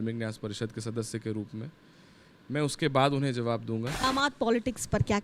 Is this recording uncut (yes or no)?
no